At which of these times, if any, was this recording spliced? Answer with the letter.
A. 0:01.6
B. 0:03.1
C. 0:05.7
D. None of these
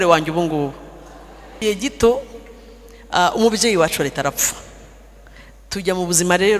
A